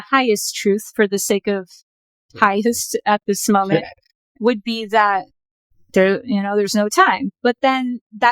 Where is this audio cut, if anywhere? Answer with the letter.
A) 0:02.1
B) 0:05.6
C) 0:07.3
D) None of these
C